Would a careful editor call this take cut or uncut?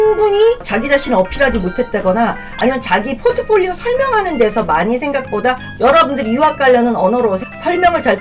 uncut